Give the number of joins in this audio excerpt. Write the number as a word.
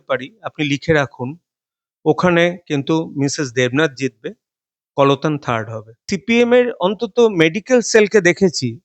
one